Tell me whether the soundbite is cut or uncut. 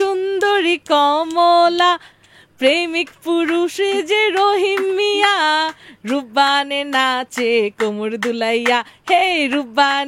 uncut